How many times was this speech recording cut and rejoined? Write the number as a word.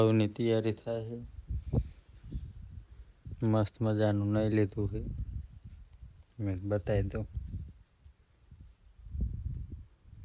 zero